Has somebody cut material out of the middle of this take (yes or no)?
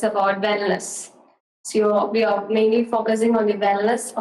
no